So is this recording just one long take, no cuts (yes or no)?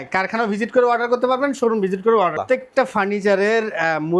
no